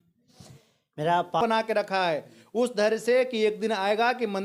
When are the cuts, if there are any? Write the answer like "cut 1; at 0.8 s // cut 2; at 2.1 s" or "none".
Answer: cut 1; at 1.4 s

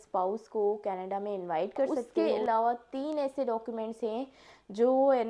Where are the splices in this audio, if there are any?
cut 1; at 2.0 s

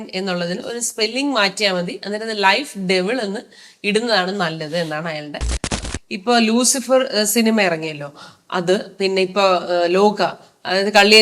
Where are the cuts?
cut 1; at 5.7 s

